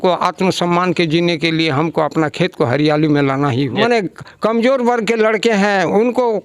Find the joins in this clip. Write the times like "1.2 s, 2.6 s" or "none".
3.8 s